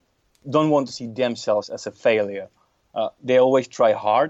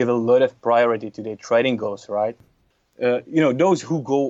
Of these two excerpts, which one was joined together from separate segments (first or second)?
second